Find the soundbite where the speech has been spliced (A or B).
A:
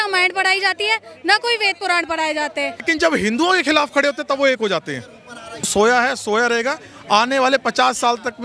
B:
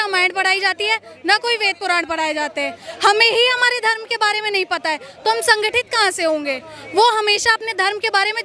A